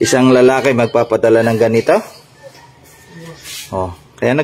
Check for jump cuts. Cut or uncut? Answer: uncut